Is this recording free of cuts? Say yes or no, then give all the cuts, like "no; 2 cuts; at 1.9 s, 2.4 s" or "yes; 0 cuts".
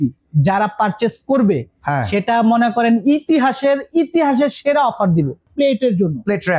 no; 1 cut; at 5.5 s